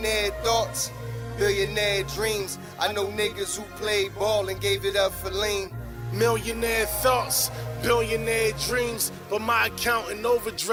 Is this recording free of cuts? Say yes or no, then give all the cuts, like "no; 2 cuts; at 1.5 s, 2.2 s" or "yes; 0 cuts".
yes; 0 cuts